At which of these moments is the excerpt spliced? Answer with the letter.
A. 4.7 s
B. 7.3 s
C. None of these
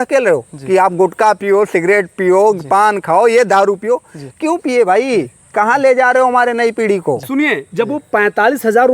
B